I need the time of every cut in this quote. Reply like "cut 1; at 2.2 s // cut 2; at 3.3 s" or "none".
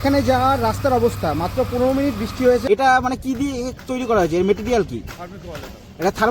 cut 1; at 2.6 s